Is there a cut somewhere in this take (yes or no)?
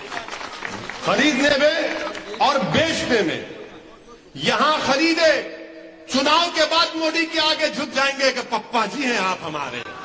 no